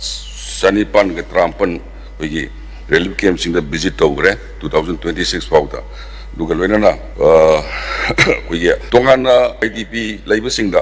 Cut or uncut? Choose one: cut